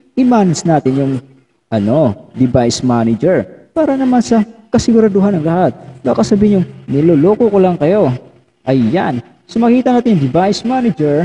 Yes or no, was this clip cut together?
no